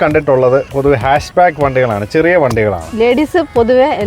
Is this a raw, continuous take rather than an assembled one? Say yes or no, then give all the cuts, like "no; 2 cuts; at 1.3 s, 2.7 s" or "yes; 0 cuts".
no; 1 cut; at 2.8 s